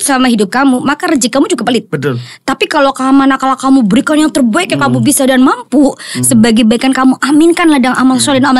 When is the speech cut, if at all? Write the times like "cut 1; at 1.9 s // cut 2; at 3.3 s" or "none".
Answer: none